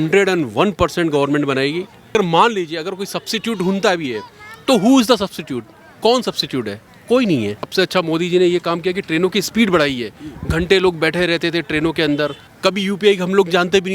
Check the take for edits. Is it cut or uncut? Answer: cut